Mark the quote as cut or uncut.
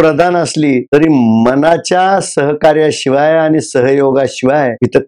uncut